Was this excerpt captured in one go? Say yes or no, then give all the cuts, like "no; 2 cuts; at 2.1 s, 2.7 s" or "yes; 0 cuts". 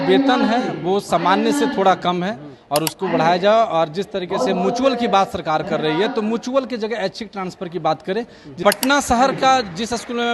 no; 1 cut; at 8.5 s